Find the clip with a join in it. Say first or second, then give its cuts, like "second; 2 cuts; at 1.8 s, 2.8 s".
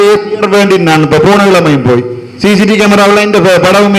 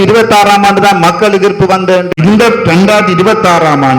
second; 1 cut; at 2.1 s